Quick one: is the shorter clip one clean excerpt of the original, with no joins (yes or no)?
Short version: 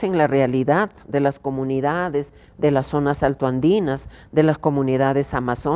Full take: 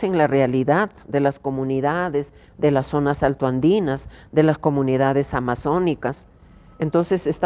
yes